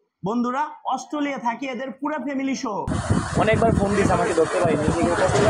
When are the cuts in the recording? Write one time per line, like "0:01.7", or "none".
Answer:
0:03.0